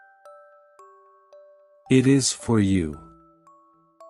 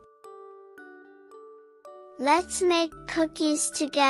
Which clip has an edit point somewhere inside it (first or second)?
first